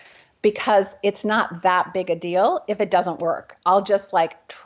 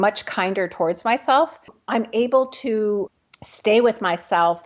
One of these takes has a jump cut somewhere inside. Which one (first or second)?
second